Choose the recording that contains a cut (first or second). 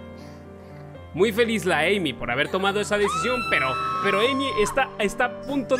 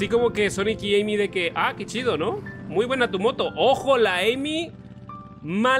first